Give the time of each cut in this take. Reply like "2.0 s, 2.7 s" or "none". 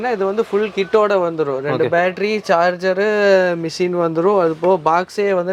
none